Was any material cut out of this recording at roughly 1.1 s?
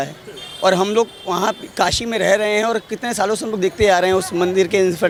no; 0 cuts

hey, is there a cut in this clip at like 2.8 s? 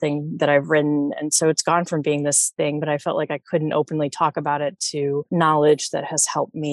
yes; 2 cuts; at 2.8 s, 5.3 s

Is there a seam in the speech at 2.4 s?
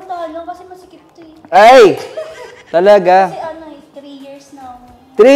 no; 0 cuts

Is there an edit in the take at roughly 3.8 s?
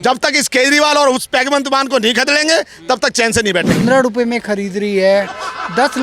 yes; 1 cut; at 3.8 s

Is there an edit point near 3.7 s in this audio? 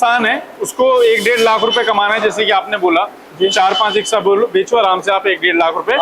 no; 0 cuts

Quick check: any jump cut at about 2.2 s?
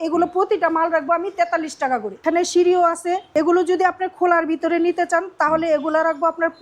yes; 2 cuts; at 2.2 s, 3.2 s

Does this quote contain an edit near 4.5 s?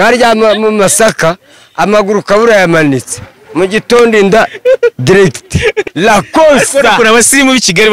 no; 1 cut; at 5.8 s

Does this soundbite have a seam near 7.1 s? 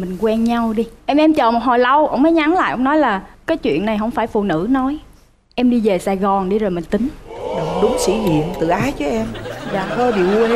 no; 0 cuts

